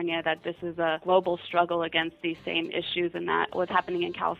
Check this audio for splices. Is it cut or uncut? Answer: cut